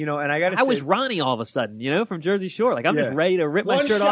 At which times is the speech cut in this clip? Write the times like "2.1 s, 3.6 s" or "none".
3.2 s